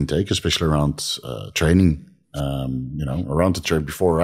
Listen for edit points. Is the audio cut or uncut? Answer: uncut